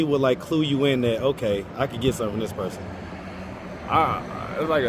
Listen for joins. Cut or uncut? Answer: uncut